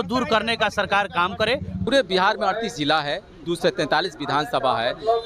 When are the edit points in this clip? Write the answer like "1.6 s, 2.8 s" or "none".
1.9 s